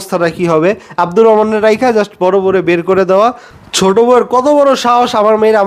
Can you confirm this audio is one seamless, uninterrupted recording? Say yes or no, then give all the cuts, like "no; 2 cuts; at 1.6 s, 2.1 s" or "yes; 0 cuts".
no; 1 cut; at 3.5 s